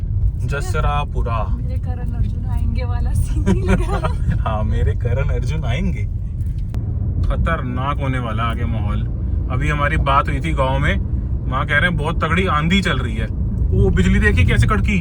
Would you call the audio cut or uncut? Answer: cut